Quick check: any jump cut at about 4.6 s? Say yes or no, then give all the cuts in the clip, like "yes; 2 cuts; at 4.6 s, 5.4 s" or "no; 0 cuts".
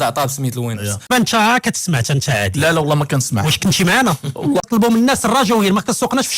yes; 2 cuts; at 1.1 s, 4.6 s